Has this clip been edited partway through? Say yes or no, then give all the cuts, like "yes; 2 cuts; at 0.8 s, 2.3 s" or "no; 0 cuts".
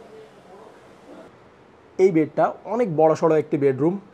yes; 1 cut; at 1.3 s